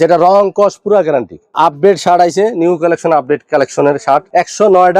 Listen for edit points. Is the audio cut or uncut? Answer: cut